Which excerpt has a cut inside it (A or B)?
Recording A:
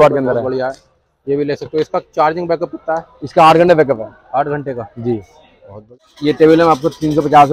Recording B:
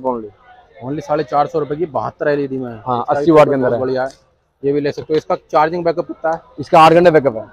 A